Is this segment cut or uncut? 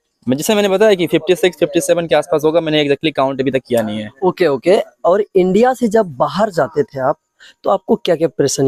uncut